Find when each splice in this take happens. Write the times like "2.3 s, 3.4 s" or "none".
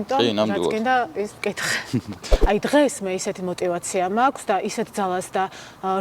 2.3 s